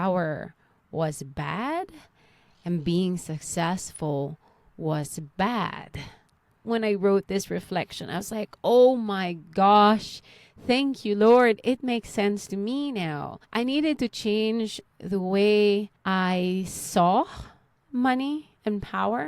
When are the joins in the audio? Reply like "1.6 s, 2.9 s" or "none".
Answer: 6.7 s, 13.3 s, 16.0 s

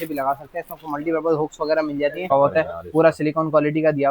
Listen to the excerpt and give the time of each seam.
2.3 s

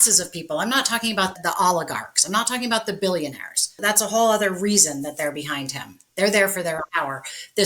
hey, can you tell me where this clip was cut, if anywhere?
1.3 s, 3.8 s, 6.8 s

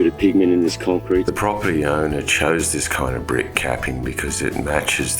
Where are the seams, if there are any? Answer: 1.2 s

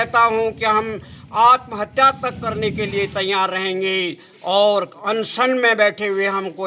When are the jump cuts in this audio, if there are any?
none

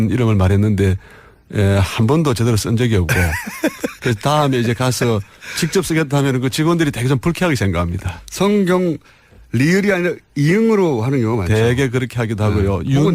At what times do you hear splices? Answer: 5.6 s

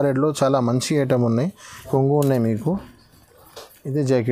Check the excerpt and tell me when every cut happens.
1.9 s

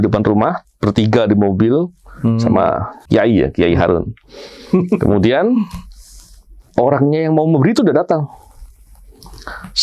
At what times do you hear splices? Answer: 2.9 s

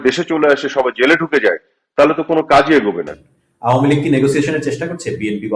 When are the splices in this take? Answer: 3.1 s

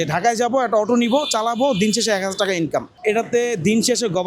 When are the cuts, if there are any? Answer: 2.9 s

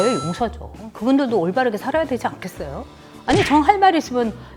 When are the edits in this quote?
none

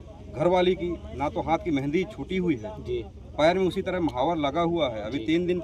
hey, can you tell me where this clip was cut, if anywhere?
none

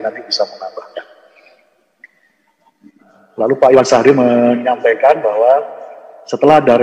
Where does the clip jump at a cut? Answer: 3.2 s

